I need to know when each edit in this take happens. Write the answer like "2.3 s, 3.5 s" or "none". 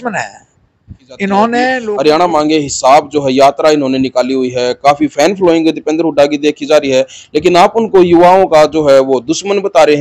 1.8 s